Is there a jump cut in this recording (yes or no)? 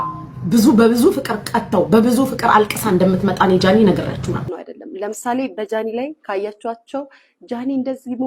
yes